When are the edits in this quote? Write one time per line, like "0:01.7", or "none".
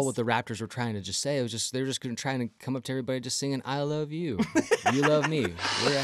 none